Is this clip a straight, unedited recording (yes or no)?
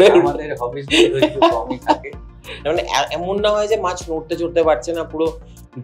no